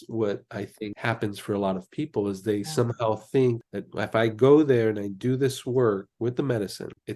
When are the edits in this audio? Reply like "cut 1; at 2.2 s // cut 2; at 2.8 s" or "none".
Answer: none